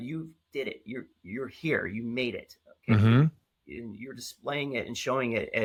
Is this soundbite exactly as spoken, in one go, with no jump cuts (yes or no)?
yes